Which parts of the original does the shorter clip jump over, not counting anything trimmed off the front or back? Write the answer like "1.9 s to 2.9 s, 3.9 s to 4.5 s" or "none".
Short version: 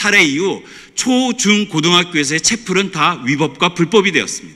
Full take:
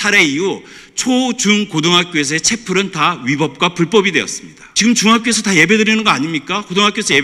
none